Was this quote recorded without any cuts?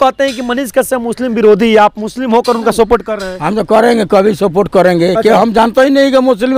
yes; 0 cuts

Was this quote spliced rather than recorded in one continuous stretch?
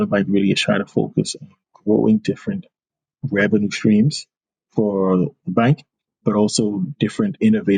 no; 0 cuts

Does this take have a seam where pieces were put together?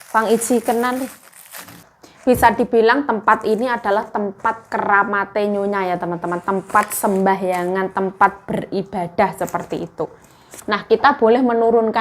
yes; 1 cut; at 1.8 s

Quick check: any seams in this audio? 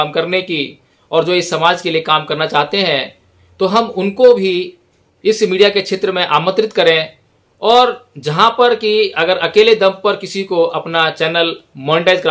no; 0 cuts

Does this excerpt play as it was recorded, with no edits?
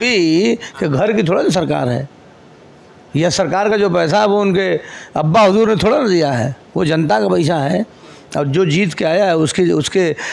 yes; 0 cuts

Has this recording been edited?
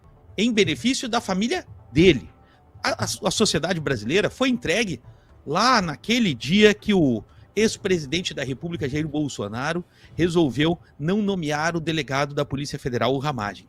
no; 0 cuts

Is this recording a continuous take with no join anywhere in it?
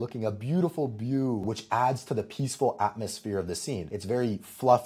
no; 2 cuts; at 1.4 s, 3.9 s

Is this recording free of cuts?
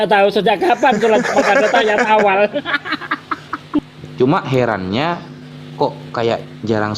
no; 1 cut; at 3.8 s

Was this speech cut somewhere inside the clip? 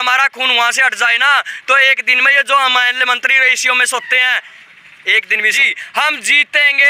yes; 1 cut; at 5.5 s

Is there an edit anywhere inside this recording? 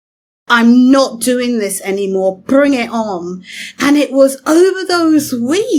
no; 0 cuts

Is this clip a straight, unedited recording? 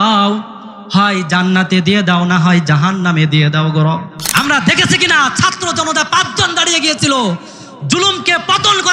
no; 1 cut; at 4.2 s

